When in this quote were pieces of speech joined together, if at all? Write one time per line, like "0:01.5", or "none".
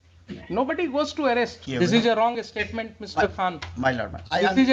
0:01.6